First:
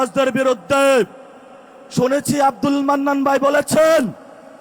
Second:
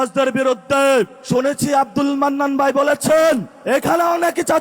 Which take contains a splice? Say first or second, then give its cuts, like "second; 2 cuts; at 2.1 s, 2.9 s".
second; 2 cuts; at 1.2 s, 3.5 s